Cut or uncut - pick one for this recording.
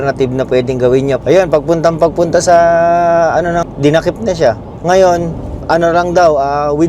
cut